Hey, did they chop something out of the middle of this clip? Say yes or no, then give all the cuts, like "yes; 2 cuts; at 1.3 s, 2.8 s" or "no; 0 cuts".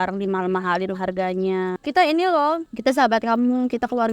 yes; 2 cuts; at 1.8 s, 2.7 s